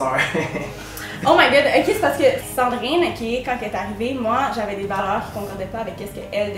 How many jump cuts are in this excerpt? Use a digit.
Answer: 1